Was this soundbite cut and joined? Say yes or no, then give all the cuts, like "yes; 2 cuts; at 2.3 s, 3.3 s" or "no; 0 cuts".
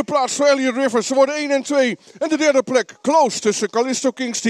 no; 0 cuts